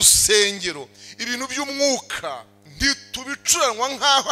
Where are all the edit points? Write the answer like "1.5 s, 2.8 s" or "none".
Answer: 2.5 s